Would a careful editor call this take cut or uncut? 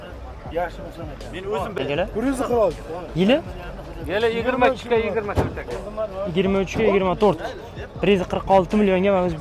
cut